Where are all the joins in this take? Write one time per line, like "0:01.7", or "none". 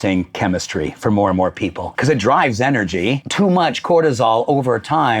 0:01.9
0:03.2